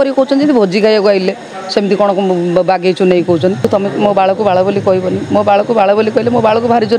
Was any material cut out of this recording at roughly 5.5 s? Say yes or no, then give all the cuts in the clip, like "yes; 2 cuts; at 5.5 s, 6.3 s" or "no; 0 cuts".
no; 1 cut; at 3.7 s